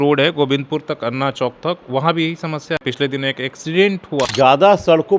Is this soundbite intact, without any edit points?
no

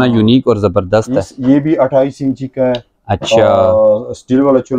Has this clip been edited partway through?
no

